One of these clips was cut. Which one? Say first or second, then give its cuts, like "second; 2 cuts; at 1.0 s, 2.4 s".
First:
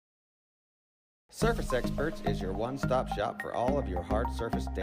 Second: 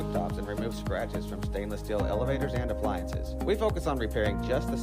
first; 1 cut; at 2.4 s